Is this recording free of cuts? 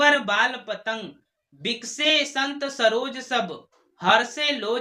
yes; 0 cuts

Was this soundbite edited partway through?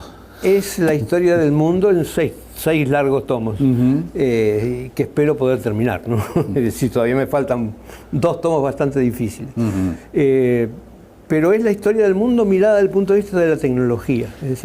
yes; 1 cut; at 1.4 s

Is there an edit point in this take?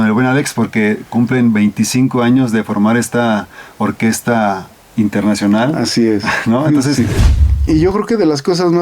yes; 1 cut; at 7.3 s

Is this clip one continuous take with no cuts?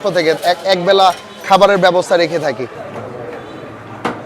no; 1 cut; at 2.7 s

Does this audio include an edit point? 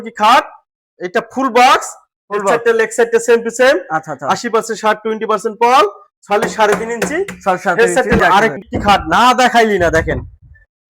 yes; 1 cut; at 8.2 s

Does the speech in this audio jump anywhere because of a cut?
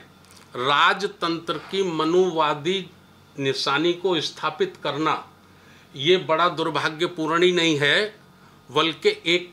no; 0 cuts

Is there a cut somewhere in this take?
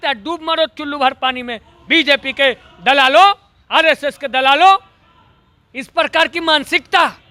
no; 0 cuts

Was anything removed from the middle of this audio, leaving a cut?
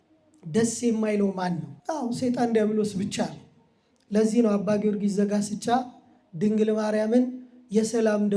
yes; 1 cut; at 1.7 s

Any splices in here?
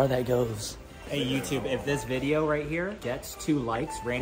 yes; 2 cuts; at 1.0 s, 3.0 s

